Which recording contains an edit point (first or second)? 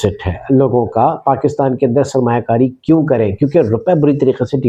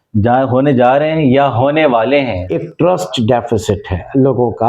second